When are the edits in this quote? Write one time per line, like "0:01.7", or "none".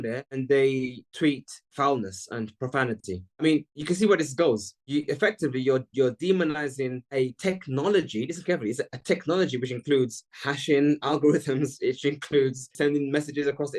0:12.7